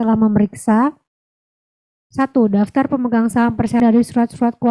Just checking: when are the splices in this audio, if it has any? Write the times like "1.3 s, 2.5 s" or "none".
3.8 s